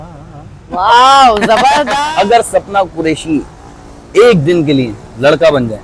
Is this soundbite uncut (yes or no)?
no